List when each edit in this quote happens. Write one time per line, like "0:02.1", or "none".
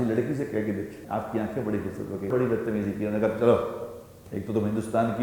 0:01.0
0:02.3